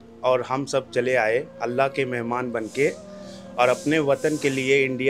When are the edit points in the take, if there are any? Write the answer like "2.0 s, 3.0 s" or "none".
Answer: none